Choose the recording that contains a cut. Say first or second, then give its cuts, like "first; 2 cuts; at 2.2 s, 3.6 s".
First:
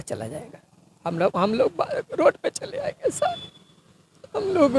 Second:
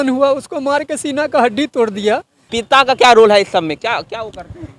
second; 1 cut; at 2.5 s